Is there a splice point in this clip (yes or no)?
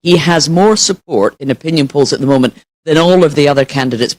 no